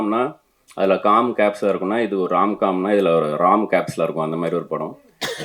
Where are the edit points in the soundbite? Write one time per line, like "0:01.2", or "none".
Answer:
none